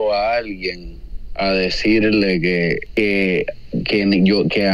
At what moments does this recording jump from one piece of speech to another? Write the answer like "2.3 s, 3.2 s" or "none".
2.8 s